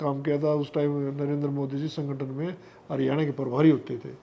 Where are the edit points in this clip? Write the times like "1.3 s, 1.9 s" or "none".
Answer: none